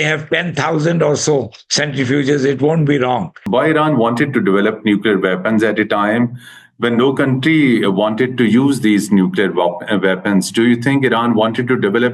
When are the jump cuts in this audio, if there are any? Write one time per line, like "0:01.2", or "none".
0:03.4